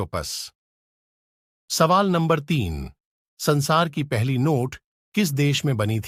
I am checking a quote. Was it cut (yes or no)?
no